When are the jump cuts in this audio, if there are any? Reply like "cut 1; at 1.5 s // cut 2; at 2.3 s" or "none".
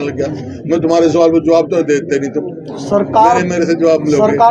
none

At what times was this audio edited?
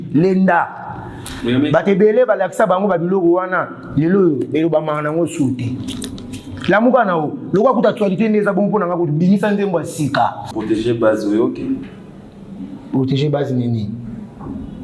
cut 1; at 10.5 s

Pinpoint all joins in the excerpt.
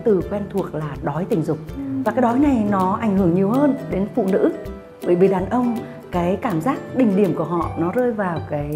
none

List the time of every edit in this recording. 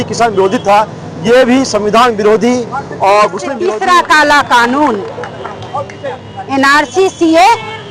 cut 1; at 3.5 s

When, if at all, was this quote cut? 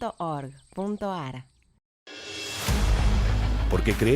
cut 1; at 1.8 s

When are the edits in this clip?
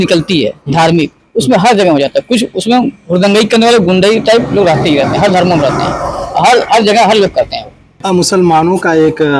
cut 1; at 8.0 s

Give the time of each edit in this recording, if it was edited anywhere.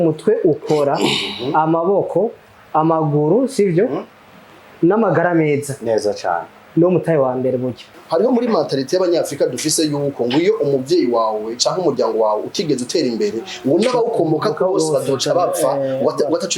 cut 1; at 7.9 s

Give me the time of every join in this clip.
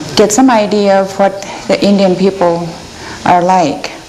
cut 1; at 1.1 s

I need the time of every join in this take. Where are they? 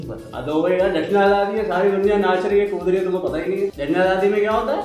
cut 1; at 3.8 s

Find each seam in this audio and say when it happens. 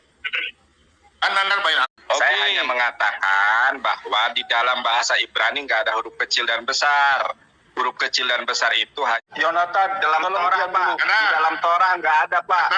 cut 1; at 1.9 s // cut 2; at 9.2 s

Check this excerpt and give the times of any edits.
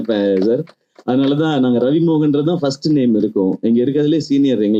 none

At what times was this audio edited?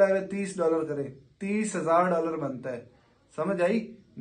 none

